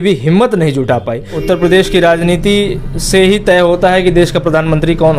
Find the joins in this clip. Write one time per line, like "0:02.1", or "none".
0:01.3